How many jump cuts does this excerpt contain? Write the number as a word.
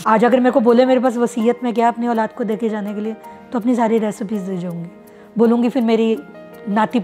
zero